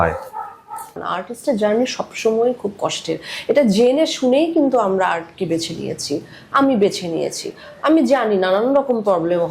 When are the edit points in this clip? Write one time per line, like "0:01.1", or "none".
0:00.9